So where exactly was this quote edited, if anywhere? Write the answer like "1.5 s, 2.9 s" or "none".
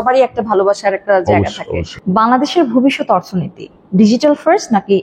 1.9 s

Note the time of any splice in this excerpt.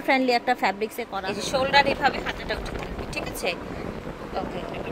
1.0 s

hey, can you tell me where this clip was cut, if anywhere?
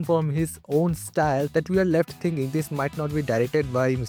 none

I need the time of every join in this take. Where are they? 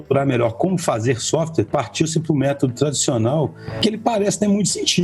3.6 s

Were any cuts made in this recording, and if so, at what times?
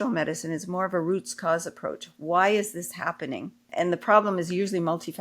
3.7 s

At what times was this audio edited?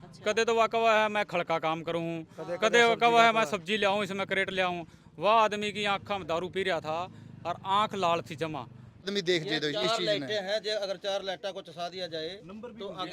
9.0 s

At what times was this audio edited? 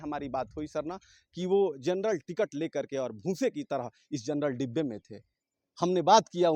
none

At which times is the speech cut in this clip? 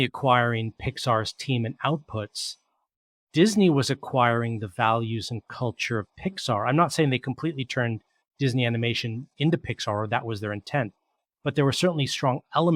none

